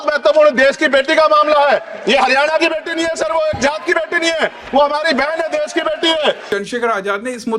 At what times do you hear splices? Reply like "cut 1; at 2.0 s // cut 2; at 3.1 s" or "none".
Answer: cut 1; at 6.4 s